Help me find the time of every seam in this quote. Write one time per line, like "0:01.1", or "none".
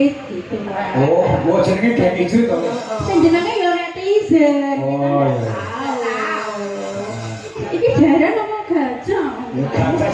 0:07.6